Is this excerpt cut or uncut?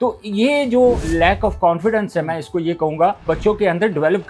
cut